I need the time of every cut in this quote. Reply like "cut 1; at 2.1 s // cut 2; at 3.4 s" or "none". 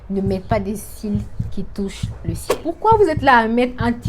cut 1; at 2.5 s